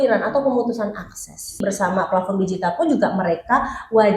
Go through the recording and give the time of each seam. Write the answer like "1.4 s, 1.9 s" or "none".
1.6 s